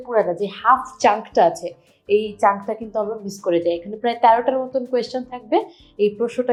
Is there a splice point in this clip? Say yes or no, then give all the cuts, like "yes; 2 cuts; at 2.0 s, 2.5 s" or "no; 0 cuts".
no; 0 cuts